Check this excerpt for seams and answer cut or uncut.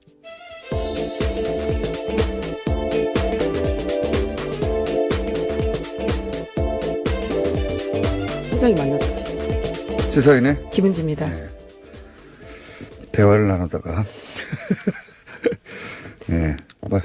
cut